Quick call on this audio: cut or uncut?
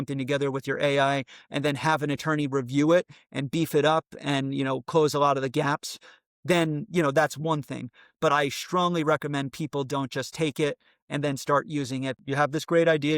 cut